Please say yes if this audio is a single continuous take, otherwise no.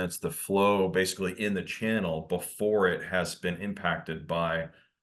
yes